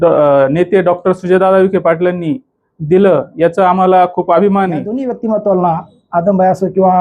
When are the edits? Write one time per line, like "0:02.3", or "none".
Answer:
0:05.0